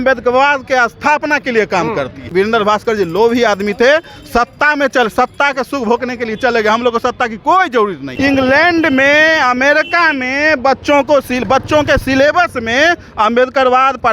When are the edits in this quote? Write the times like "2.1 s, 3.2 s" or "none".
2.3 s, 8.1 s